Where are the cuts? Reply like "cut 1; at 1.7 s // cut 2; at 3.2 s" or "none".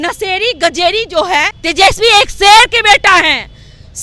cut 1; at 1.6 s